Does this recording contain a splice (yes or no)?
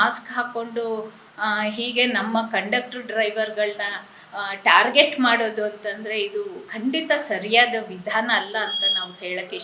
no